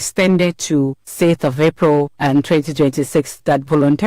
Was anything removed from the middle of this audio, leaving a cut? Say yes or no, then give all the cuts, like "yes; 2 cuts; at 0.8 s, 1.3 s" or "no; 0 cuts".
yes; 2 cuts; at 1.0 s, 2.1 s